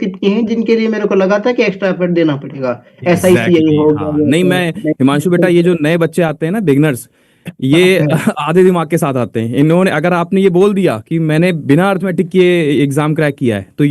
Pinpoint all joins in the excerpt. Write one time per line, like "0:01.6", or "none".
none